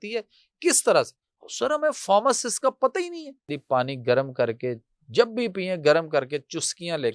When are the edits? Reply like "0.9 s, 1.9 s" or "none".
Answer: 3.5 s

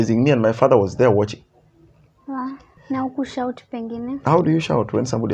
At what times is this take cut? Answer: 2.7 s

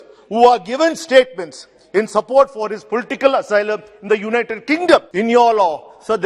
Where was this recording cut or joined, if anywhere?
5.1 s

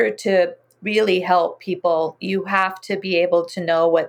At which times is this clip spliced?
none

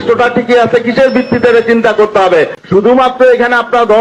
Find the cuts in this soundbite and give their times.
2.6 s

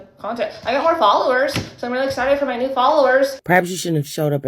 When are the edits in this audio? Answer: 3.4 s

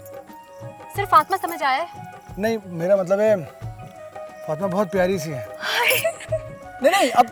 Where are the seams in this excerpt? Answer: none

